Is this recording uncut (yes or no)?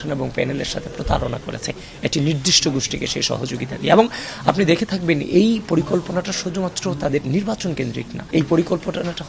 yes